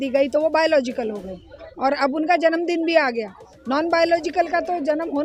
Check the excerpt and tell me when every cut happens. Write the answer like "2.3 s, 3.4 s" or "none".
none